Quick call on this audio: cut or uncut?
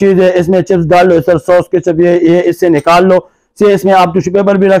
uncut